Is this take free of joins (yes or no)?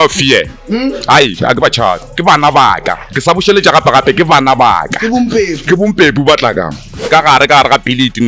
no